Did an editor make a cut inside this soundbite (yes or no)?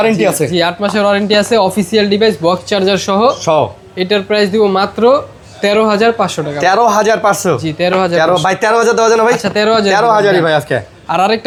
no